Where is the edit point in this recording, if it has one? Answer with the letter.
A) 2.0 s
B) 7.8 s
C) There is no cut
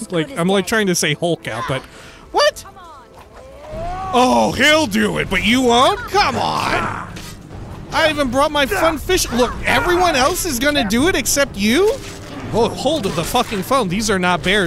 B